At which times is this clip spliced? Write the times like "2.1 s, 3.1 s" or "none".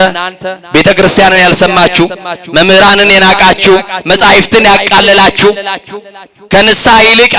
none